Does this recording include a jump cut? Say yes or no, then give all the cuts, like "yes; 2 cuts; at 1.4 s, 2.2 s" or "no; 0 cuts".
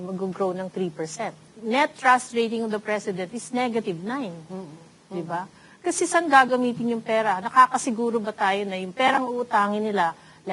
yes; 1 cut; at 1.5 s